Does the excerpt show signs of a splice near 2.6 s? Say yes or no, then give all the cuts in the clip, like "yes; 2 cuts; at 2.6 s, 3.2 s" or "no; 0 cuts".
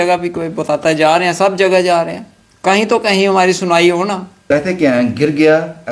no; 1 cut; at 4.5 s